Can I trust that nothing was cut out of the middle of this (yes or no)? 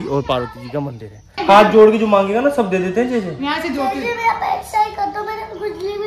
no